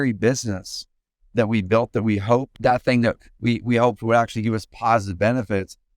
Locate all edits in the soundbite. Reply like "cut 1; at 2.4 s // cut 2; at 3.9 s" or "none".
cut 1; at 2.5 s